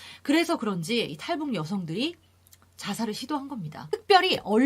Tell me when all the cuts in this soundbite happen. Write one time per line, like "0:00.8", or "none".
0:03.8